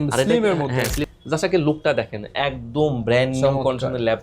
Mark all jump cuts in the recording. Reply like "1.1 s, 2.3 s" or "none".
1.0 s